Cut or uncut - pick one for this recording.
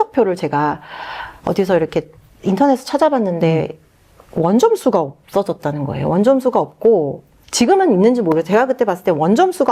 uncut